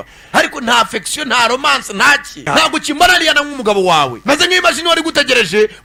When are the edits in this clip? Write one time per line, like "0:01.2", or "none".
none